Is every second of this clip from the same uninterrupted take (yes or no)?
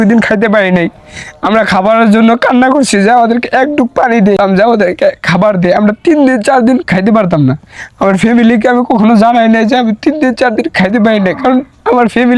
no